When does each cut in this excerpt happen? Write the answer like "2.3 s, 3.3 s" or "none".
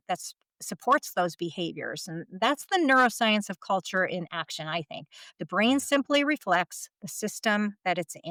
none